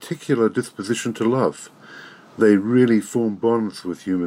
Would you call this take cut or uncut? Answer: cut